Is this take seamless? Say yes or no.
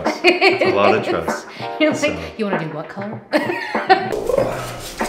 no